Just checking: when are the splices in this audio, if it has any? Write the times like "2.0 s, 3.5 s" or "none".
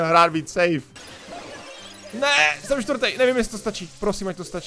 0.9 s